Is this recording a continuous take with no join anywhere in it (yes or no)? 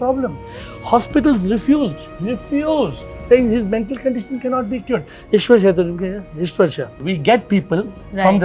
yes